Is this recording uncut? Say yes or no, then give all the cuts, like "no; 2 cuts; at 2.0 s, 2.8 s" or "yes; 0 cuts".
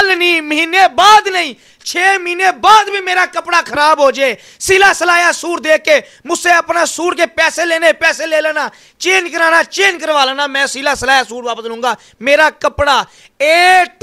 yes; 0 cuts